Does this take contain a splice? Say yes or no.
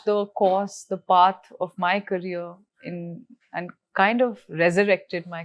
no